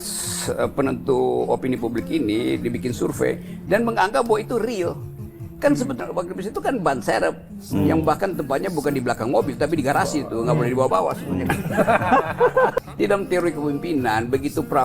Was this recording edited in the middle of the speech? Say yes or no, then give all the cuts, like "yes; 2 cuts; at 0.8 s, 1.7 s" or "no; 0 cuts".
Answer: yes; 2 cuts; at 6.0 s, 12.7 s